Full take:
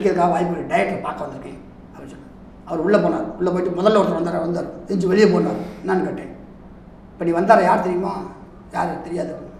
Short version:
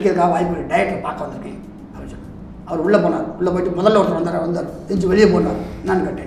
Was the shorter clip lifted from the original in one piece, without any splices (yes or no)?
yes